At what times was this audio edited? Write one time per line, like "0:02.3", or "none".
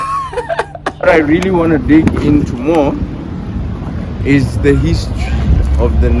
0:01.1